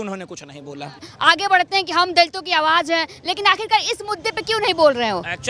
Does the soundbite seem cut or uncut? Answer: cut